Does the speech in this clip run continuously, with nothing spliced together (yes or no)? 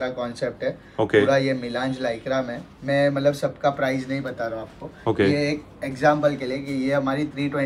yes